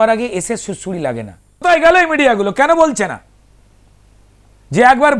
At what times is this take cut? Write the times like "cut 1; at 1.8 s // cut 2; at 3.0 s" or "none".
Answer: cut 1; at 1.6 s

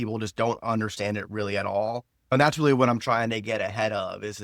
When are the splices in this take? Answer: cut 1; at 2.3 s

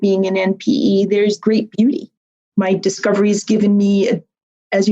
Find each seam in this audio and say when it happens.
cut 1; at 2.5 s

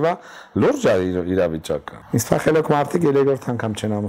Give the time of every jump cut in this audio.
cut 1; at 2.0 s

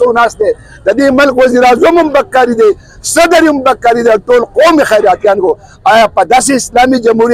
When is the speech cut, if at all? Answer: none

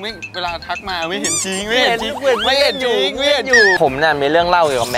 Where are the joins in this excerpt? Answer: cut 1; at 3.8 s

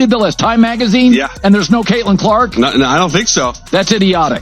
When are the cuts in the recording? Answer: cut 1; at 1.2 s

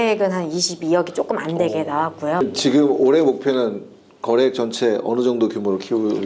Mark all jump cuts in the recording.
cut 1; at 2.4 s

